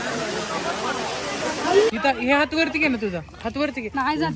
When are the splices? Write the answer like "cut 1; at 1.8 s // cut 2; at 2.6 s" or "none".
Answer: cut 1; at 1.9 s